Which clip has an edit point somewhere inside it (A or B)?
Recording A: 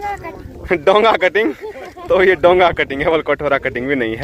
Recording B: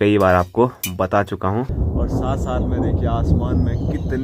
B